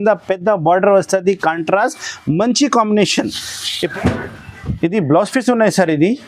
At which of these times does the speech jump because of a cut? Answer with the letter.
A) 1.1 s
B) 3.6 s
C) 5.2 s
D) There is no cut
B